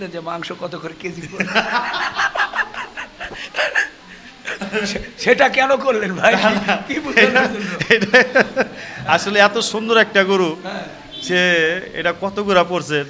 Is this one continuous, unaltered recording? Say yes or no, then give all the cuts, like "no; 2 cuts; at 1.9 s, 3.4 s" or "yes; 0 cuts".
yes; 0 cuts